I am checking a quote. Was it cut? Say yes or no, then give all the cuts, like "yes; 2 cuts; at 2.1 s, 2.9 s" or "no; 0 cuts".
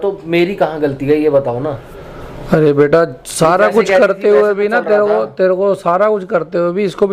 no; 0 cuts